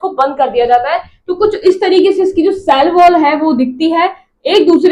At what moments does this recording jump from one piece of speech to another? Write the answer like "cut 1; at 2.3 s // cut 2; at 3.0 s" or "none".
none